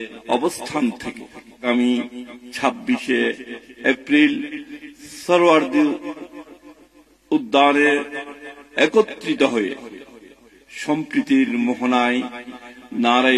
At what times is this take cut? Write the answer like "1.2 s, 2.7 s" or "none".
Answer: 1.6 s